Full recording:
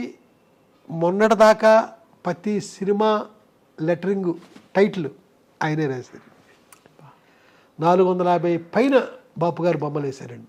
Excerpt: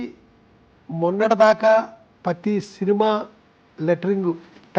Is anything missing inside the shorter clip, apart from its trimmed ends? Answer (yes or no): no